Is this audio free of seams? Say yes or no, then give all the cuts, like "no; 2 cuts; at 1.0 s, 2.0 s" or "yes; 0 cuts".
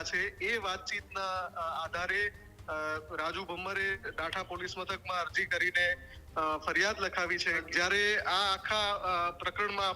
no; 1 cut; at 7.6 s